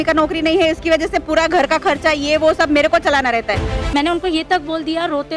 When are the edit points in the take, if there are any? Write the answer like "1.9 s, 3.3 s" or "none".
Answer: 3.7 s

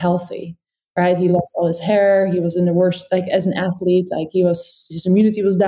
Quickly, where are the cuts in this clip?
none

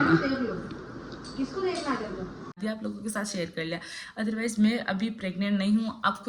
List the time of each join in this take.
2.6 s

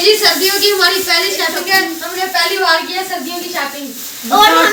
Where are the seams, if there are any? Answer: none

